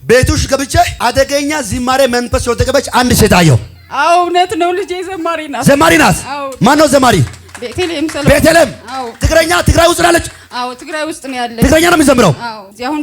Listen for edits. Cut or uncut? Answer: cut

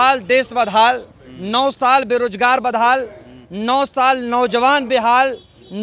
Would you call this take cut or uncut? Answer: uncut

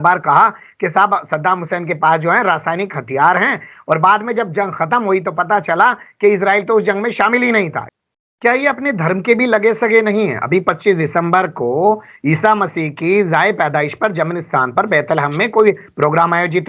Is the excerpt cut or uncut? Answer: cut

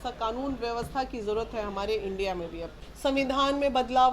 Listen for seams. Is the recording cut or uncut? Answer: cut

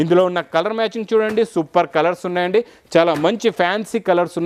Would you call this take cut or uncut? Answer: uncut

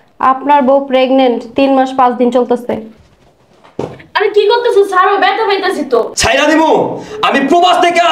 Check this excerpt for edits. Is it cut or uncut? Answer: cut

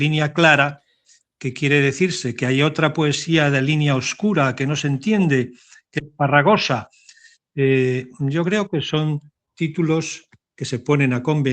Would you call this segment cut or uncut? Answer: uncut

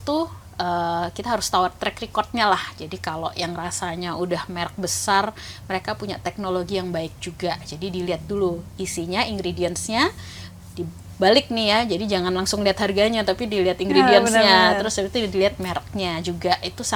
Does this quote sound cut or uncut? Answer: uncut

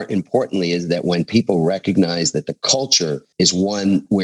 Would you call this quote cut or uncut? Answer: cut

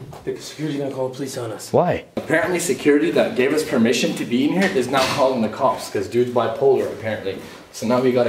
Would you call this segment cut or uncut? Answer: uncut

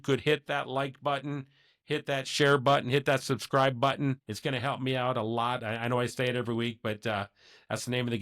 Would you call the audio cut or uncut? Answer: cut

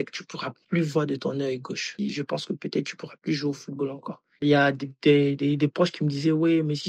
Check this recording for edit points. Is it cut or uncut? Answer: cut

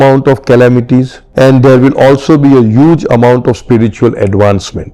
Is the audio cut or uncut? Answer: cut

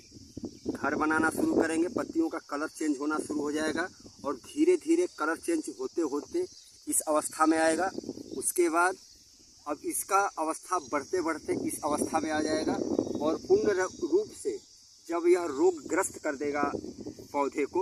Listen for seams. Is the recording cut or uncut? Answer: uncut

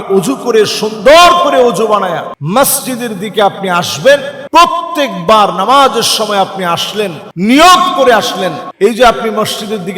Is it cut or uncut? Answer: cut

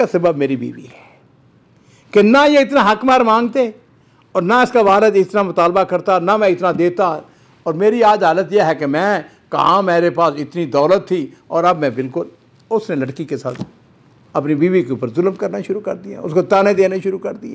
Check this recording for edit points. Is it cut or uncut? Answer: uncut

